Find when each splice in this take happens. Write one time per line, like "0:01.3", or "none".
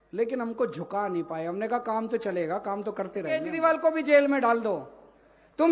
0:03.5